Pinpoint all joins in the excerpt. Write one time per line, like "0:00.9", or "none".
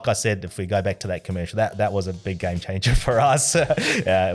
none